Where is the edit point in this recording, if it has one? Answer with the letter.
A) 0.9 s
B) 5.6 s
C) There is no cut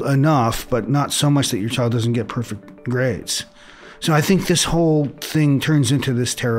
B